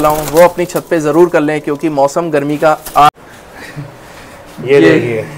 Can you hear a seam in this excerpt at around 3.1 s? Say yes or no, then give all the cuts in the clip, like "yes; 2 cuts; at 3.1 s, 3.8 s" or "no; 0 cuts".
yes; 1 cut; at 3.1 s